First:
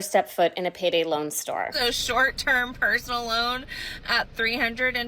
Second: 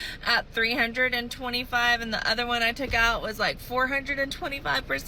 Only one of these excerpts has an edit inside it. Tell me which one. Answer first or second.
first